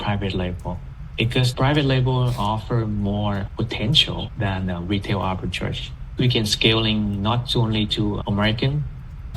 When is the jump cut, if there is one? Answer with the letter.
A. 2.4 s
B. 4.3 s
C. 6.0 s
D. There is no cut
D